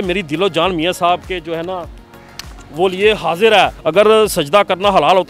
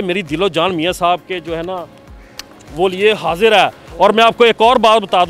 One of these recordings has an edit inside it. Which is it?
first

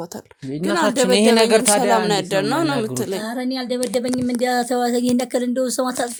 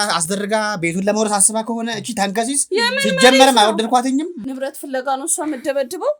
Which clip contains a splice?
second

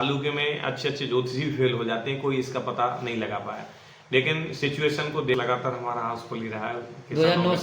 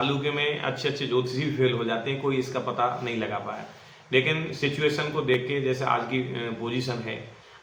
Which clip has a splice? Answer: first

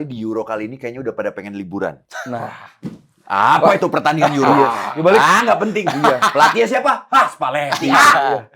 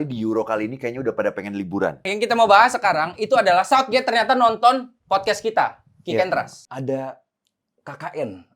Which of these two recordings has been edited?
second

